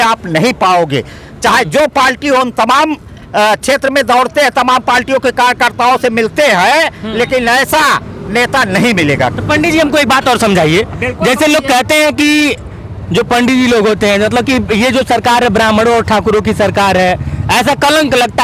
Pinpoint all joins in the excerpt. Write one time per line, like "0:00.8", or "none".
none